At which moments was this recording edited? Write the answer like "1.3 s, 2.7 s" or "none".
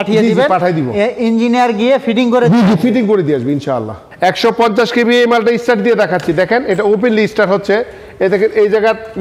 none